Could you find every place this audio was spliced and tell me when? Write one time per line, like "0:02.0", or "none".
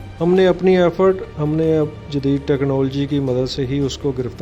none